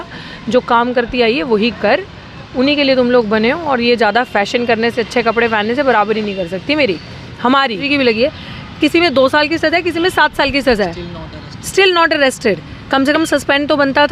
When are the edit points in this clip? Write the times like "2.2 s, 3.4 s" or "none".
7.8 s